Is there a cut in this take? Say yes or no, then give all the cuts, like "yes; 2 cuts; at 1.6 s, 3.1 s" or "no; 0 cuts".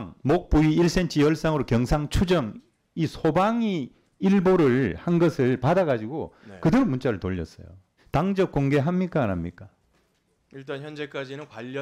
yes; 1 cut; at 8.0 s